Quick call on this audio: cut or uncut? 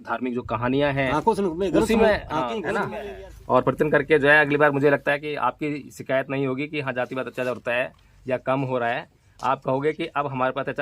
cut